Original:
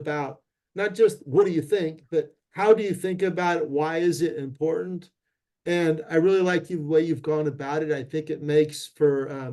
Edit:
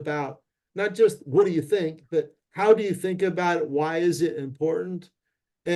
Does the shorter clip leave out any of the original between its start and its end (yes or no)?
no